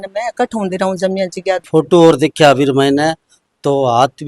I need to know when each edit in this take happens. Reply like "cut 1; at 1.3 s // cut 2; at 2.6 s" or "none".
cut 1; at 1.6 s